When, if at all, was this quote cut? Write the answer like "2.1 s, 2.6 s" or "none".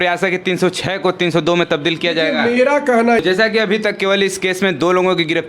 3.2 s